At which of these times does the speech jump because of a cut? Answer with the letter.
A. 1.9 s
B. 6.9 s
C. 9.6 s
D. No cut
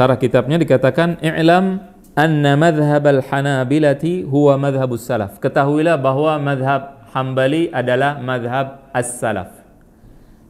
D